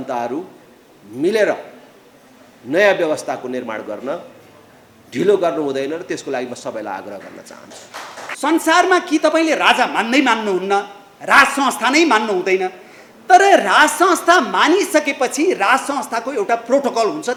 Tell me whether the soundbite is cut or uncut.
uncut